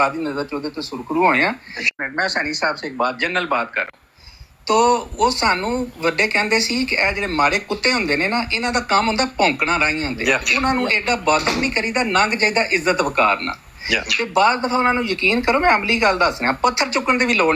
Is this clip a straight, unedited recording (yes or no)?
no